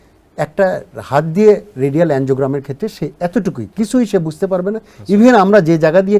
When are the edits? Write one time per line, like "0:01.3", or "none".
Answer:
none